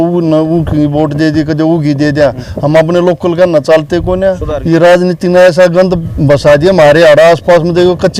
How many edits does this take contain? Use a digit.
1